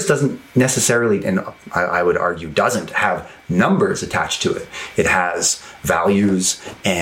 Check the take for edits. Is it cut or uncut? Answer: uncut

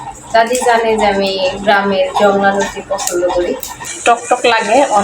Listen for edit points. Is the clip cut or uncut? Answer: cut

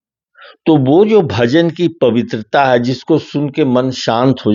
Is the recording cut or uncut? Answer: uncut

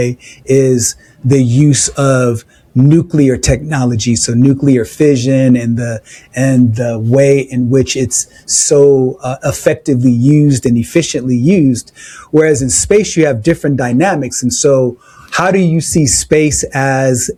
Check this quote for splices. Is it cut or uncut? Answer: uncut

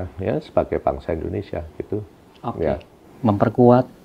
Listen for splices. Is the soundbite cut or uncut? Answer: uncut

